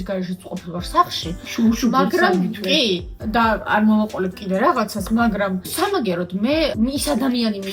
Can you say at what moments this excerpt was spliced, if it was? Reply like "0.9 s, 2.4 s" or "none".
none